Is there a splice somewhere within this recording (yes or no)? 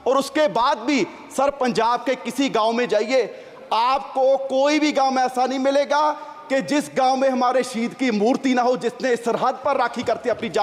no